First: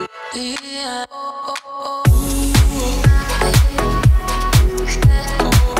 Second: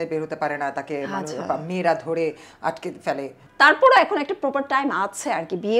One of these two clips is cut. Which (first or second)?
second